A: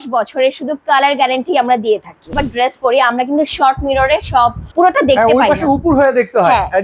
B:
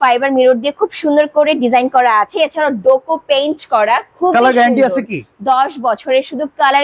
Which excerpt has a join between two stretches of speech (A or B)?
A